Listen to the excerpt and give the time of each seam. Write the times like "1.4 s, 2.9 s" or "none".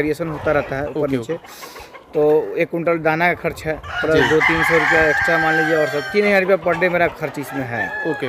none

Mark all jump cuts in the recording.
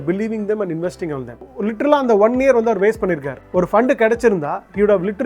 1.4 s

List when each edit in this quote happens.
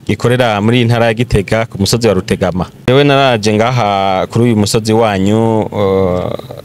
2.7 s

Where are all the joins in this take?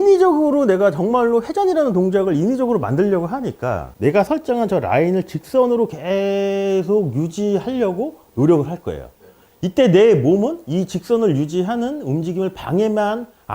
3.9 s

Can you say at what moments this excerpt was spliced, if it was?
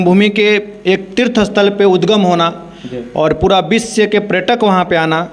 none

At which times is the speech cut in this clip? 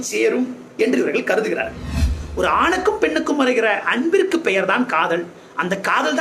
2.1 s

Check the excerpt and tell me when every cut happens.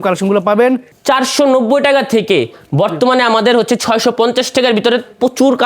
0.9 s

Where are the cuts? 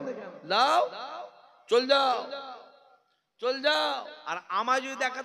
4.1 s

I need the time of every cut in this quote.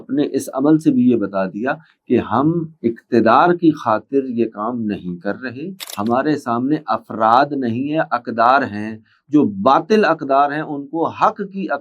5.8 s

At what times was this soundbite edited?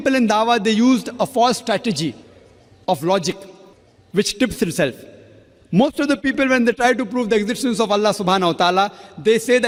none

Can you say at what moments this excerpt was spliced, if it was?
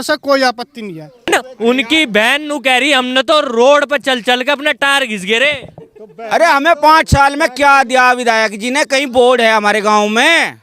1.3 s

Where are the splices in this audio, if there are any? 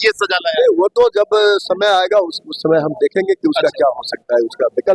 none

